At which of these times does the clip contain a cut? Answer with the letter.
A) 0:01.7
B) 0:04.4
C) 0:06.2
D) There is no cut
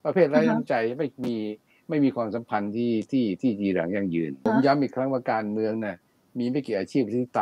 B